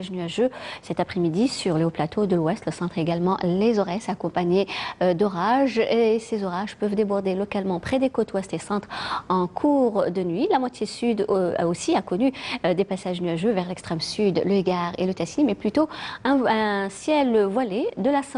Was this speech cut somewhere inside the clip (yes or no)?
no